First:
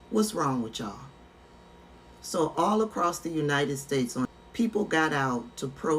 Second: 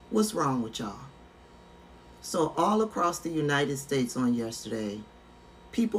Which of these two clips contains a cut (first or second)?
first